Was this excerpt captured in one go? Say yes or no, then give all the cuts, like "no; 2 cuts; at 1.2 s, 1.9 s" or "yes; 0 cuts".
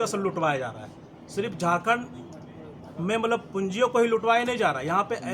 yes; 0 cuts